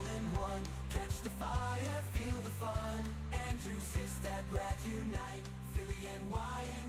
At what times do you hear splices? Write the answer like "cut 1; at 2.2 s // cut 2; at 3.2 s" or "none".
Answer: none